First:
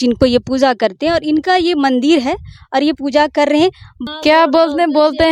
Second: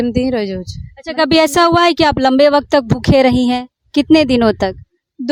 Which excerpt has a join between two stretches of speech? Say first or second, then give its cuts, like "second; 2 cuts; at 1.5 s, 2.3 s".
first; 1 cut; at 3.9 s